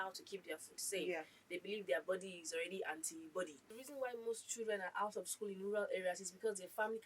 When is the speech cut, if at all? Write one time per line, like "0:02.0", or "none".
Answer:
0:03.9